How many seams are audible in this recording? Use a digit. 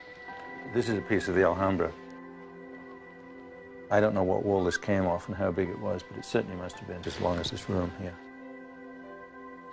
1